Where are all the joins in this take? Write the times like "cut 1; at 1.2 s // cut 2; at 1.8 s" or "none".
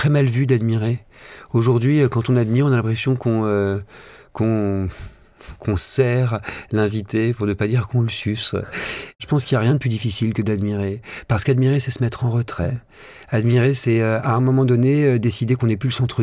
cut 1; at 9.2 s